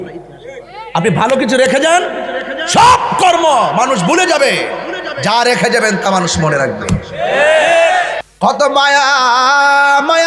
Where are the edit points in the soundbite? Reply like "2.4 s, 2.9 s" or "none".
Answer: 8.2 s